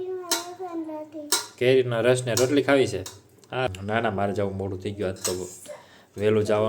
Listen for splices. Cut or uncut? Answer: cut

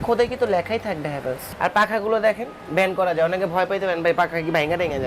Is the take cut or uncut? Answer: cut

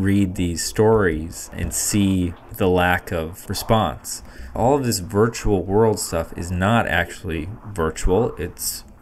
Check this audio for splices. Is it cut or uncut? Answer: cut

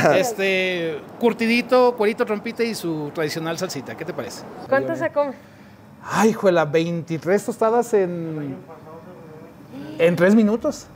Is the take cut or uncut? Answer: cut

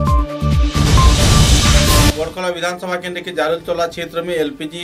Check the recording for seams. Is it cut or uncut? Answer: cut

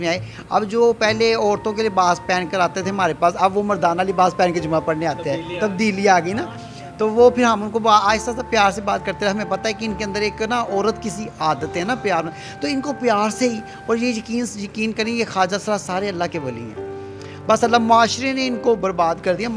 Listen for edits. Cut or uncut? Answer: uncut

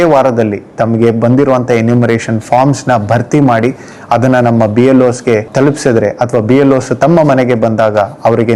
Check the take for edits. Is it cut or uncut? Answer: uncut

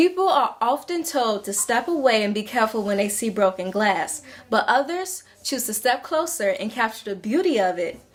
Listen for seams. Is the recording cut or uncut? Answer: uncut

